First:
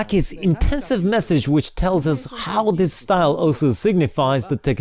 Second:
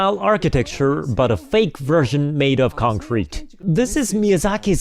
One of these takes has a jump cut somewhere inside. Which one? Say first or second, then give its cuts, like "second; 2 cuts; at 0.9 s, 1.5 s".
second; 1 cut; at 3.6 s